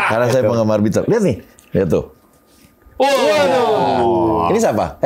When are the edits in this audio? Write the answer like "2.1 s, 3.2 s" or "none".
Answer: none